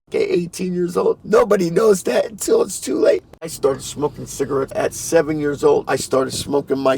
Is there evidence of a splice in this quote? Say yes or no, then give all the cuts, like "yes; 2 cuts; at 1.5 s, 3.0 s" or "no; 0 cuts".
yes; 4 cuts; at 1.2 s, 3.5 s, 4.7 s, 5.9 s